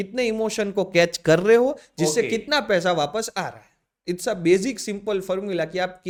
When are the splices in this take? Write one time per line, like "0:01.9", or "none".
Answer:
none